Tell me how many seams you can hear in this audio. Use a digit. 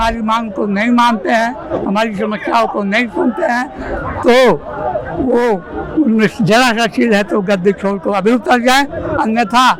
0